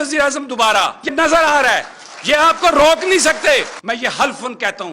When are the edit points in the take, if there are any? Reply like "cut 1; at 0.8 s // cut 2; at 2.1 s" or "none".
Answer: cut 1; at 1.1 s // cut 2; at 3.7 s

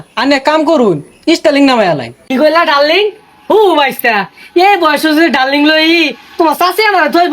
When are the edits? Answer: cut 1; at 2.2 s

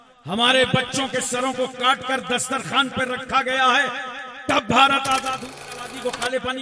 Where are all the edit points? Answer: cut 1; at 5.3 s

